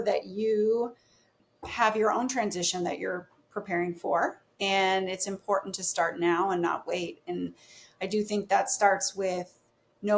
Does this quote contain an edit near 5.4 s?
no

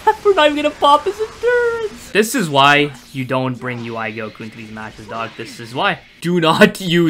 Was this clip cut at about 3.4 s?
no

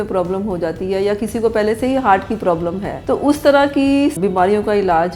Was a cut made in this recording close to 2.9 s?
yes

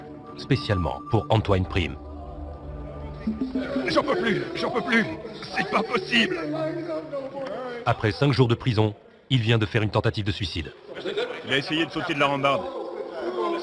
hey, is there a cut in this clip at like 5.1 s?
yes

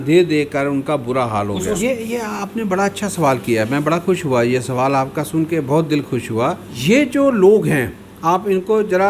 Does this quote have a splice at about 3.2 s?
no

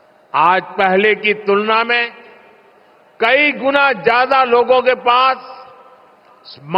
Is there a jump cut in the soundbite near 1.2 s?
yes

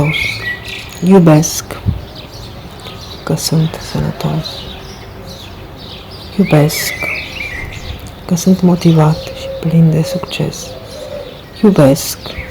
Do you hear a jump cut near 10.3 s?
no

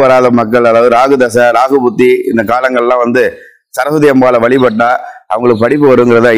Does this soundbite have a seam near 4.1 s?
no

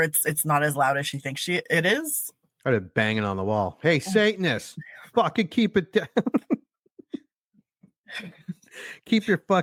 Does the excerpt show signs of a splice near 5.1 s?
no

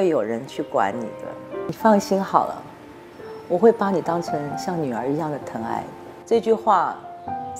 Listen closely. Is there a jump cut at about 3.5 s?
no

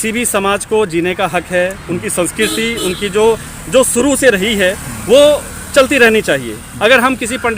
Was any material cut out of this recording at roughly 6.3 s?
no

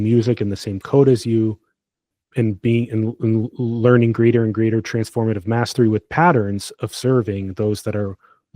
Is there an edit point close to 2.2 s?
yes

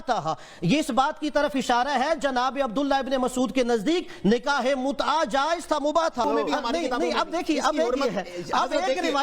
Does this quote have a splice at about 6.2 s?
yes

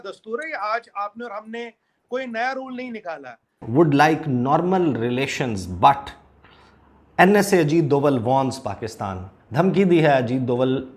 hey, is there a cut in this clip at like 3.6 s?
yes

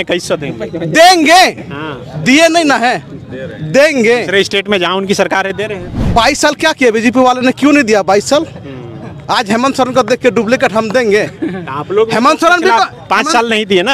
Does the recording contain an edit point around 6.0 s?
yes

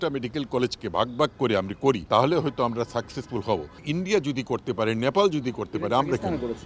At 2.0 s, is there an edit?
yes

